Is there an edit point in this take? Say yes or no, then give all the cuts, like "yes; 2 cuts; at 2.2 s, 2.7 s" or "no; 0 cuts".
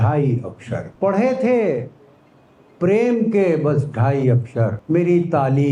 yes; 2 cuts; at 0.9 s, 4.8 s